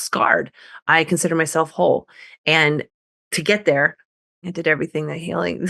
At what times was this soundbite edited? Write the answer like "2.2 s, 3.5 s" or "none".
4.4 s